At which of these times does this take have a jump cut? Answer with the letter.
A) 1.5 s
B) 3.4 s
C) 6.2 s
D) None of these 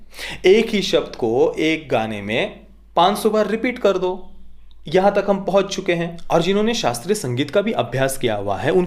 C